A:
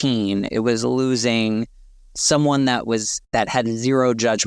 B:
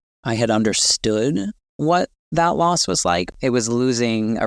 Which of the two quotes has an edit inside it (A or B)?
B